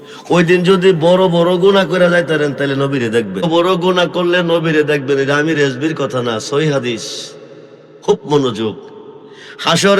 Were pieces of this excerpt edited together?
no; 0 cuts

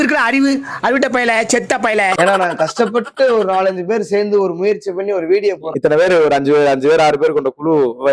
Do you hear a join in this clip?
no; 0 cuts

